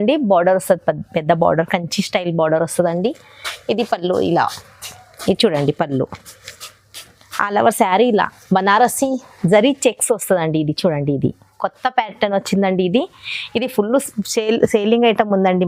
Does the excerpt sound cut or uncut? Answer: uncut